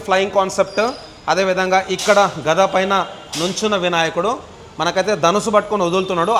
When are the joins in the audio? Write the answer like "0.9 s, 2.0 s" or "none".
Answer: none

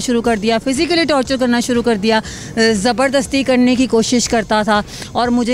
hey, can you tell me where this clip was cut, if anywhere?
none

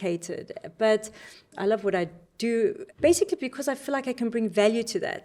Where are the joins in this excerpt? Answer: 1.5 s, 2.8 s

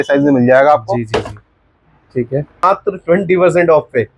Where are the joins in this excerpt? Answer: 2.6 s

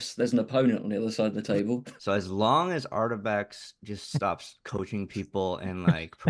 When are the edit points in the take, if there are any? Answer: 1.7 s

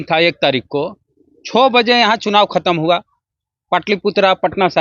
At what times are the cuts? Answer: none

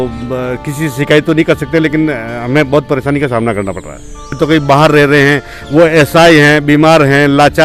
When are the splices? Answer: 4.4 s

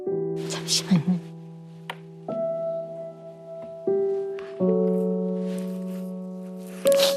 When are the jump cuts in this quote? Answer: none

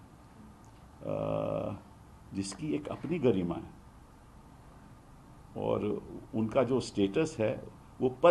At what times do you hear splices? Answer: none

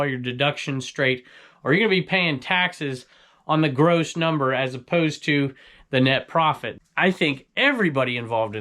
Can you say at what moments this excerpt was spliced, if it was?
6.7 s

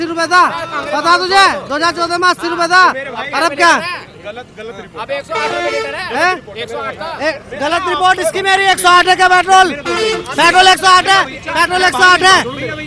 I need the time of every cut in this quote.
none

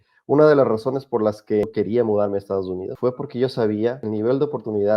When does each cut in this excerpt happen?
1.6 s, 2.9 s, 4.0 s

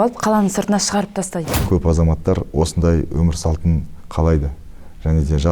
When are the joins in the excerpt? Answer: 1.5 s

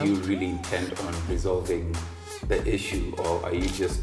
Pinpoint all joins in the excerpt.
none

